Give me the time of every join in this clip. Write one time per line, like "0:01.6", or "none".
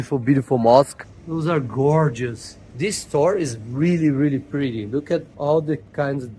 0:01.0